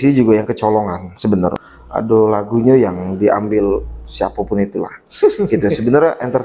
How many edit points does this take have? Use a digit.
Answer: 1